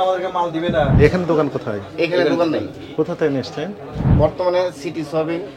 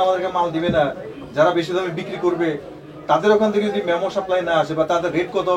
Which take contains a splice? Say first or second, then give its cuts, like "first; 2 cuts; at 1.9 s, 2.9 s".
first; 2 cuts; at 0.9 s, 4.1 s